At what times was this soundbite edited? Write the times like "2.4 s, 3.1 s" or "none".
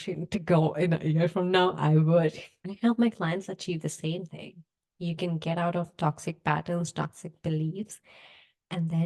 2.6 s